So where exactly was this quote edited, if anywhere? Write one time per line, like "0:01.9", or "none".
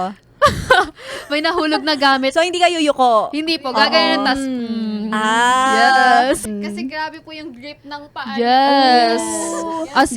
0:06.4